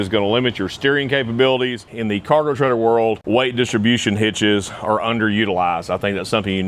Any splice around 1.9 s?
yes; 2 cuts; at 1.9 s, 3.2 s

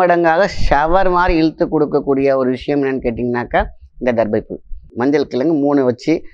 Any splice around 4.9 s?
yes; 1 cut; at 4.9 s

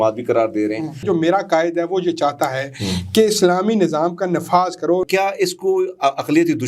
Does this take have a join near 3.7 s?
no; 2 cuts; at 1.0 s, 5.0 s

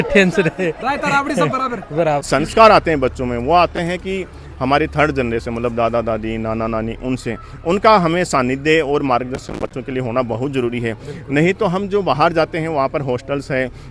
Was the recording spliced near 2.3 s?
yes; 1 cut; at 2.3 s

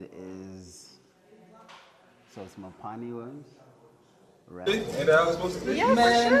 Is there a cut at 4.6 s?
yes; 1 cut; at 4.6 s

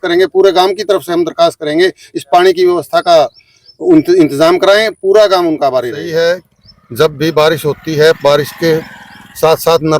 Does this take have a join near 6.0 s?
yes; 1 cut; at 6.0 s

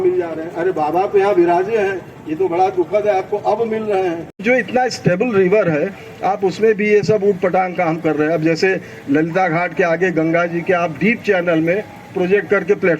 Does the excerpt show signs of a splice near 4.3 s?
yes; 1 cut; at 4.3 s

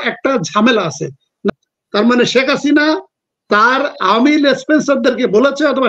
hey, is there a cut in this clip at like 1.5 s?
yes; 1 cut; at 1.5 s

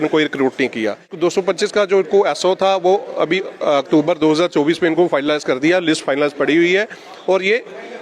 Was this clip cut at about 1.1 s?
yes; 1 cut; at 1.1 s

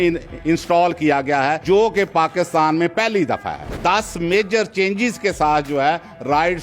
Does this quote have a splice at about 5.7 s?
no; 2 cuts; at 1.6 s, 3.7 s

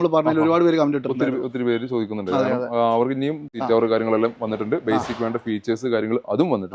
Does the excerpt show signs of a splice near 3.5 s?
yes; 1 cut; at 3.5 s

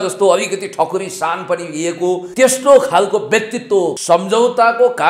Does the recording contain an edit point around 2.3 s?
yes; 2 cuts; at 2.3 s, 4.0 s

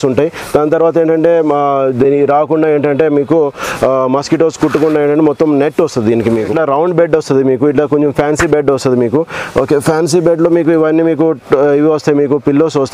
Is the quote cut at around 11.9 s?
no; 1 cut; at 6.5 s

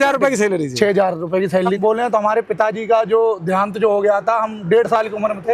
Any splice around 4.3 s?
no; 1 cut; at 1.8 s

